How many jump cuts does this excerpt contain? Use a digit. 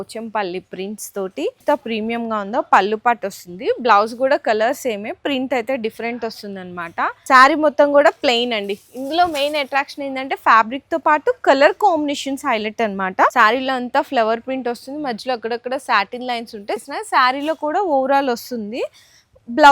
4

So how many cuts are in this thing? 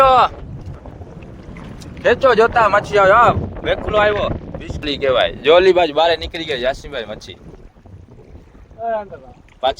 1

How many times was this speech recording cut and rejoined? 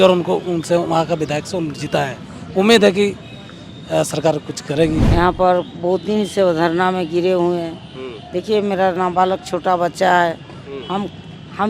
1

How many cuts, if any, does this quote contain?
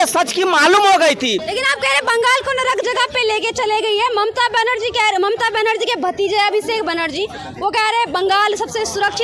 1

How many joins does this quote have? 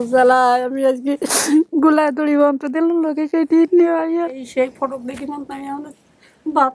1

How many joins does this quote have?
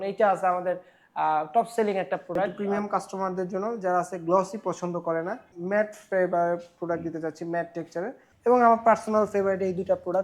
3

